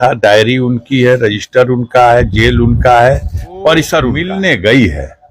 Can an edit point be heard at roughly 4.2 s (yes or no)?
yes